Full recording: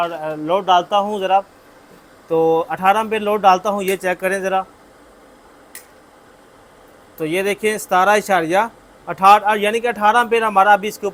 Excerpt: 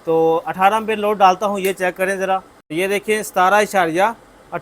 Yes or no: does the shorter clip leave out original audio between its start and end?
yes